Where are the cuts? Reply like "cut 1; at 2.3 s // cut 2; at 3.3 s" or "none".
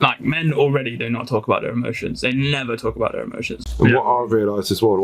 cut 1; at 3.6 s